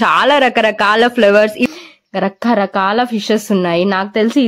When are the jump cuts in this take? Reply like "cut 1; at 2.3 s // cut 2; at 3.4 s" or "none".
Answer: cut 1; at 1.7 s